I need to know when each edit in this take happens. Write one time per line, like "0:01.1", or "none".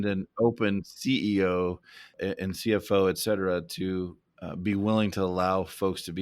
0:02.1
0:04.2